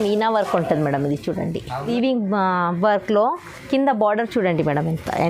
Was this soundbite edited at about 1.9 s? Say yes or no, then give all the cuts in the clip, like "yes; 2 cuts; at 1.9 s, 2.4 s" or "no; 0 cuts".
yes; 1 cut; at 1.9 s